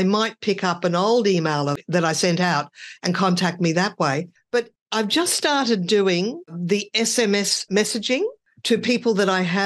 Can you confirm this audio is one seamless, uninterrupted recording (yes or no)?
no